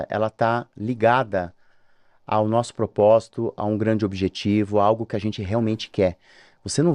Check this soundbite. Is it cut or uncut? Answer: uncut